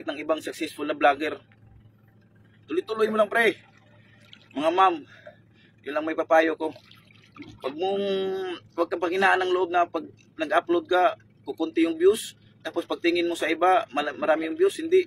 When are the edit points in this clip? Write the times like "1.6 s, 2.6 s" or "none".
none